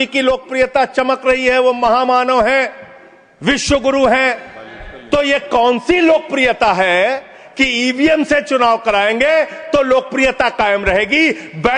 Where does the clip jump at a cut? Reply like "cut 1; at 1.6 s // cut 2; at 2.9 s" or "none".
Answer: cut 1; at 7.3 s